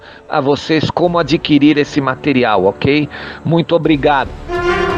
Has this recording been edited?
no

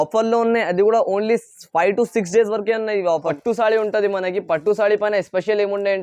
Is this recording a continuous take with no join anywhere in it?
no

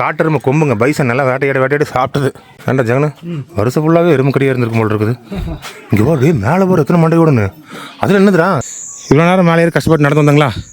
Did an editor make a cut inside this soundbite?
yes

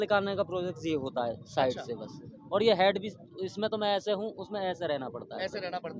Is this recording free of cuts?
yes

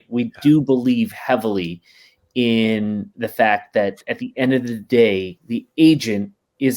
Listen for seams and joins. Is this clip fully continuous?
yes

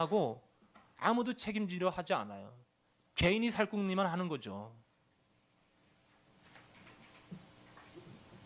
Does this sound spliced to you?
no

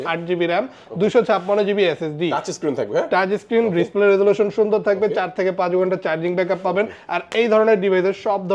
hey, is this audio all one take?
yes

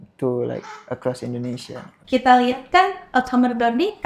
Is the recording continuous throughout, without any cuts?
no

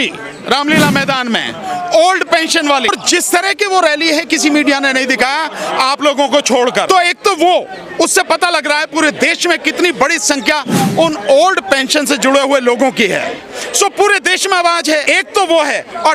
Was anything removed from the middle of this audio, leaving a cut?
yes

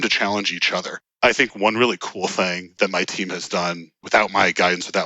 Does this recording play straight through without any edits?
no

